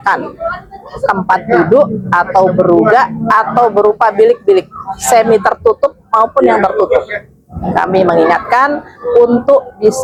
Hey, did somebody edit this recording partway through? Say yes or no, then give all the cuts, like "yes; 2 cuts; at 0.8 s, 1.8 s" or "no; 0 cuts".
no; 0 cuts